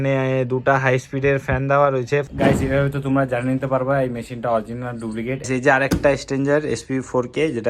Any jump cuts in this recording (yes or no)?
yes